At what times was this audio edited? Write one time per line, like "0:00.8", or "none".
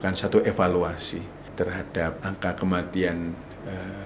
0:01.4
0:02.2

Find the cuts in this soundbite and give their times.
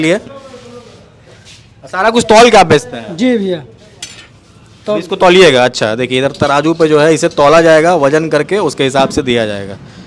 none

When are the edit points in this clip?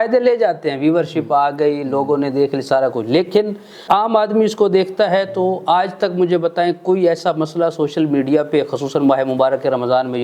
0:03.8

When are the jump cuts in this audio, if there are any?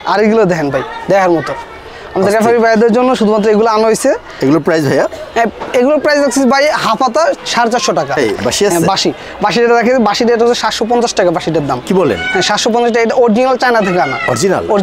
0:08.2

